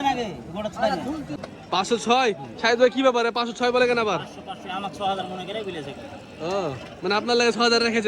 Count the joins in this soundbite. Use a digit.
1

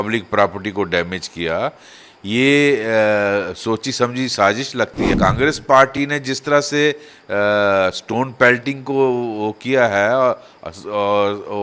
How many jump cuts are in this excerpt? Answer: 1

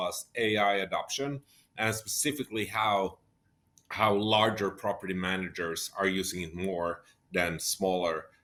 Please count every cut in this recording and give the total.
0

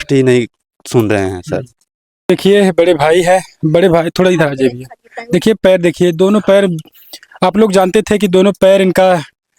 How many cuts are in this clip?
1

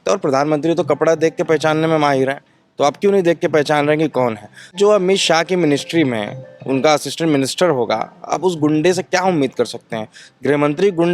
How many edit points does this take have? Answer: 1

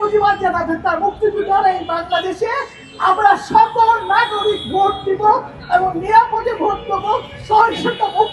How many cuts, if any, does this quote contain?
0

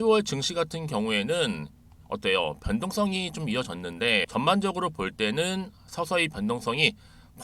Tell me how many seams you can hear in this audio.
1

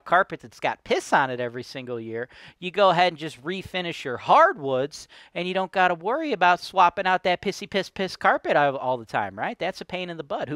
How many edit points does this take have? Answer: 0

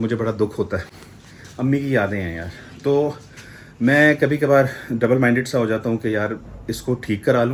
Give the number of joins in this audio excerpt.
0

